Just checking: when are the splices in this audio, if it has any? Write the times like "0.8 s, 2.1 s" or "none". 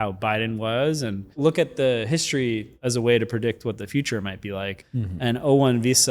1.3 s, 2.7 s, 4.8 s